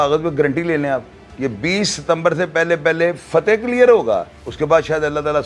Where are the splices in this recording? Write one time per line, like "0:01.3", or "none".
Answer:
none